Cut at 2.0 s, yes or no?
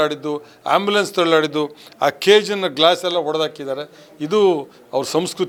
no